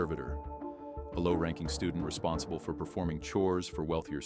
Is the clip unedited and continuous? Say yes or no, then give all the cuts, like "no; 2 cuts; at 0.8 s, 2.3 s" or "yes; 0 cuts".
yes; 0 cuts